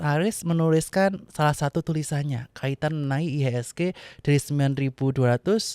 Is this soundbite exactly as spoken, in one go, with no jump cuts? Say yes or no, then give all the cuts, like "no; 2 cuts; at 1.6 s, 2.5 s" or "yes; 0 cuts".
no; 1 cut; at 1.2 s